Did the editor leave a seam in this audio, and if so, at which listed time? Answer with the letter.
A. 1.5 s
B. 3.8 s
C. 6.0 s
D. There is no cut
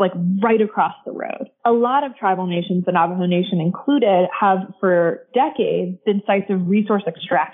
A